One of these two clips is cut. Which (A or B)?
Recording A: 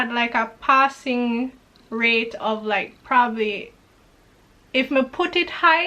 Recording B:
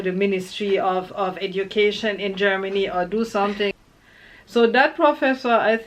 B